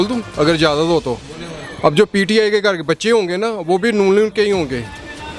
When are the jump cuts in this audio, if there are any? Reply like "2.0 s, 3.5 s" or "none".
none